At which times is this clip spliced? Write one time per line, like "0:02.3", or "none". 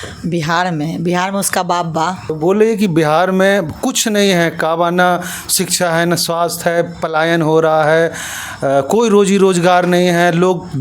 0:02.2